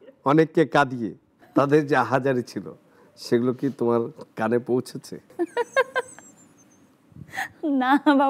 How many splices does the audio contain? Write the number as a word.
two